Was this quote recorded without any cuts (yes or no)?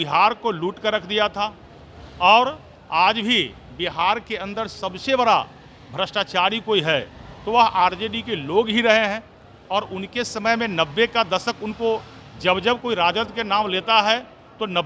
yes